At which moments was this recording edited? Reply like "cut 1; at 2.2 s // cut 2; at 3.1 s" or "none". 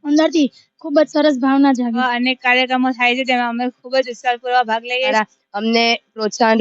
cut 1; at 2.0 s // cut 2; at 5.1 s